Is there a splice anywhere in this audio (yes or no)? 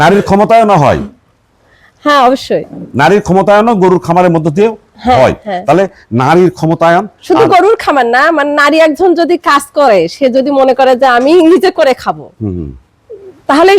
no